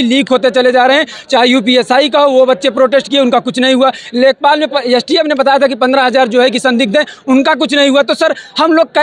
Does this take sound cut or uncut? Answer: uncut